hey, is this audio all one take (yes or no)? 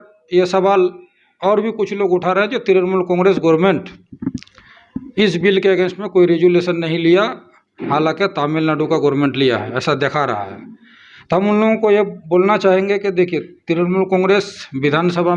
yes